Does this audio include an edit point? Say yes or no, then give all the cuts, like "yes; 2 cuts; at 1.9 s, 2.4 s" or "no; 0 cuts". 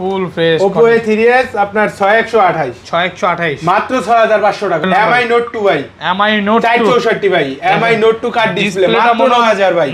yes; 1 cut; at 4.8 s